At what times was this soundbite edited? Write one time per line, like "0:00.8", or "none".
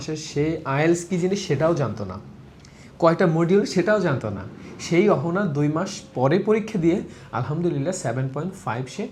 none